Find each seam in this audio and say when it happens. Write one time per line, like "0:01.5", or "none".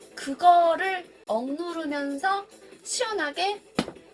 0:01.2